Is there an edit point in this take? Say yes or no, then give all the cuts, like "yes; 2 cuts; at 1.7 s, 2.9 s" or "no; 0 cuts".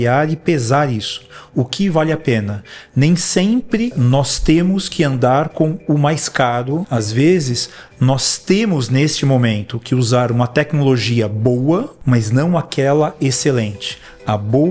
yes; 3 cuts; at 4.0 s, 6.9 s, 11.9 s